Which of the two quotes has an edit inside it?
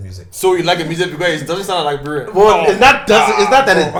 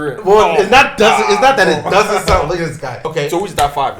second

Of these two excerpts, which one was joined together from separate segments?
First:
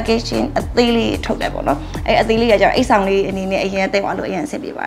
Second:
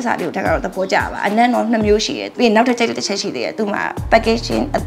second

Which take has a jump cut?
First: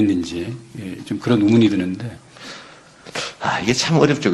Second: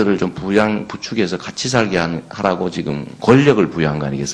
second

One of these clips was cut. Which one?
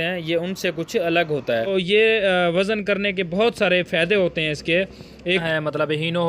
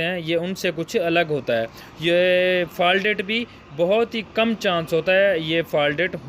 first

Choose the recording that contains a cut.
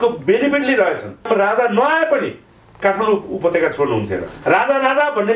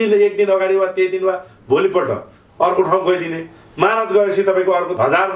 first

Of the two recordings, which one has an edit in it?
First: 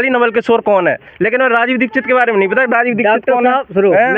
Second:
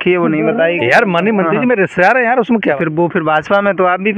second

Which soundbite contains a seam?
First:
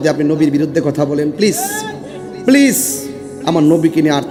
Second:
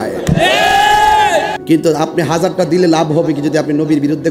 second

